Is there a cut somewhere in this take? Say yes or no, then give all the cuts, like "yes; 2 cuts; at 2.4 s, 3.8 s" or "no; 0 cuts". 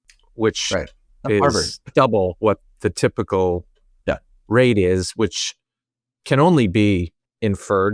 no; 0 cuts